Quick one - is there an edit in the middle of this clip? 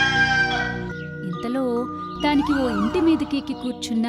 yes; 1 cut; at 1.0 s

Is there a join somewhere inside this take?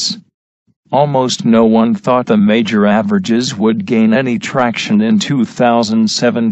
yes; 1 cut; at 5.3 s

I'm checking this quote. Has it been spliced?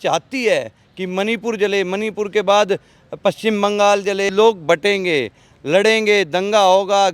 yes; 1 cut; at 4.3 s

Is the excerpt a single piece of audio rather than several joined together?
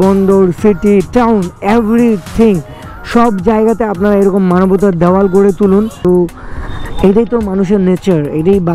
no; 1 cut; at 6.1 s

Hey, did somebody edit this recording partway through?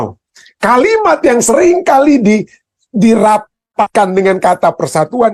no; 0 cuts

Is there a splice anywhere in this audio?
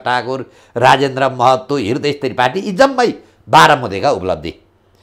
no; 0 cuts

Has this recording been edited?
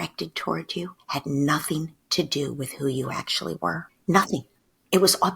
yes; 1 cut; at 3.9 s

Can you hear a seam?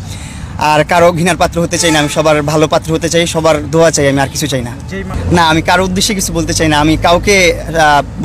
yes; 1 cut; at 5.2 s

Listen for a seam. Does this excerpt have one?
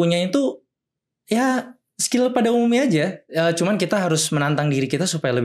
no; 0 cuts

